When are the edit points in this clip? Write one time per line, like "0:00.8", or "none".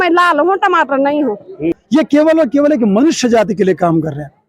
0:01.8